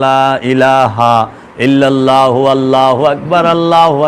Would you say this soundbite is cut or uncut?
uncut